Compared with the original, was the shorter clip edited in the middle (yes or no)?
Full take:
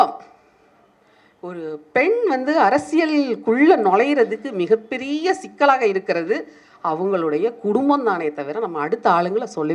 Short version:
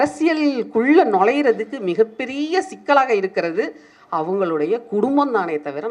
no